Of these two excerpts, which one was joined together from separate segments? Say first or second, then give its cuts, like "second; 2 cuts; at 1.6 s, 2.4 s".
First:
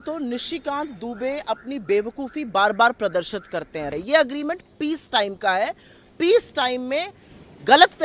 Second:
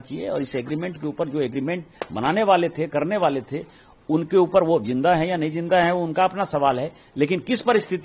first; 1 cut; at 3.9 s